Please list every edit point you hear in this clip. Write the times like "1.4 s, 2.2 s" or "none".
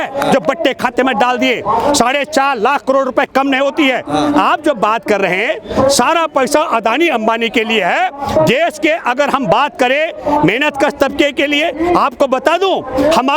none